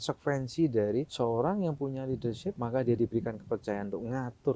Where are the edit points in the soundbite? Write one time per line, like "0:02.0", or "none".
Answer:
0:01.1
0:02.6